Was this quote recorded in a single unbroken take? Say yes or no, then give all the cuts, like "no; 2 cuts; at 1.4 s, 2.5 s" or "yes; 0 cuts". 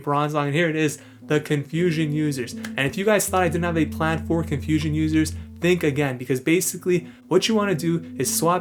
yes; 0 cuts